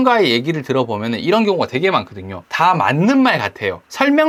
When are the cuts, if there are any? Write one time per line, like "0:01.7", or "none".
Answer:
none